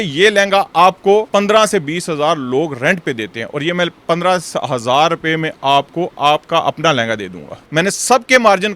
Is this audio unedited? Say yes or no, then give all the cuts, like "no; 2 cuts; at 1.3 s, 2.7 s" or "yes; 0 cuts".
no; 2 cuts; at 1.3 s, 7.6 s